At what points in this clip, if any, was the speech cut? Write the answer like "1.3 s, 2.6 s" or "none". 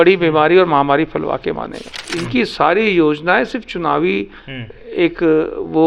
2.1 s